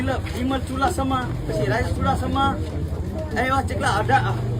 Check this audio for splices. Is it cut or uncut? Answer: uncut